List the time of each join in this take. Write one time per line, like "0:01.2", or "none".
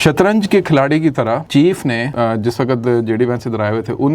0:01.5
0:02.1